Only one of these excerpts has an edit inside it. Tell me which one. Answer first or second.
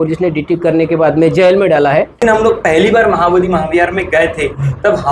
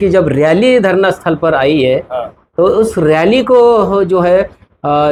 first